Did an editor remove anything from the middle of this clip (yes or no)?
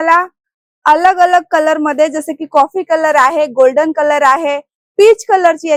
no